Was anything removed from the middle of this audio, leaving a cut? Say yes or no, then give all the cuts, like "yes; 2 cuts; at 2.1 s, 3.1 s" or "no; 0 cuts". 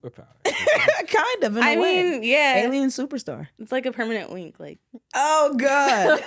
no; 0 cuts